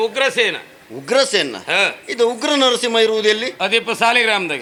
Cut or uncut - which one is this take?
uncut